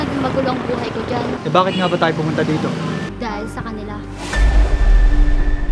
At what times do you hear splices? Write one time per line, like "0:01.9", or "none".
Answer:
0:01.4
0:03.1